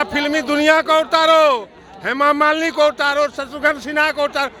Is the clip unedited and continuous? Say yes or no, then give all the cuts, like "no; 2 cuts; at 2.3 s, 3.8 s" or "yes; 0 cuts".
yes; 0 cuts